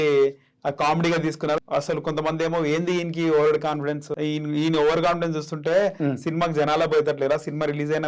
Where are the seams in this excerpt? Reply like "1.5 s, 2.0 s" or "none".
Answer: 1.6 s, 4.1 s